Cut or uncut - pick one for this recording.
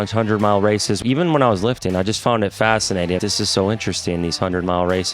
cut